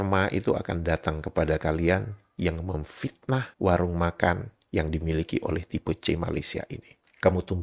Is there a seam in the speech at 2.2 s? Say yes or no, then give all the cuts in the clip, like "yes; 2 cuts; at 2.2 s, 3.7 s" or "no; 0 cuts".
no; 0 cuts